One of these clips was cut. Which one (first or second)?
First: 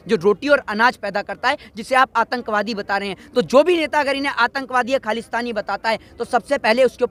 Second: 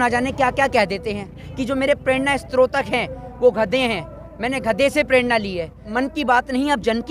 second